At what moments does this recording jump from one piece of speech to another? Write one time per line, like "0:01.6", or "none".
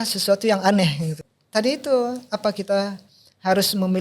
0:01.1